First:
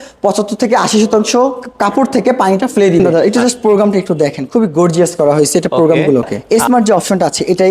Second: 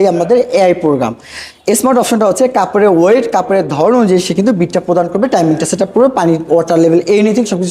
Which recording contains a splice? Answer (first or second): first